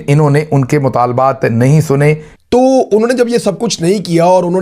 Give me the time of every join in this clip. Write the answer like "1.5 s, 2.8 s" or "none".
2.3 s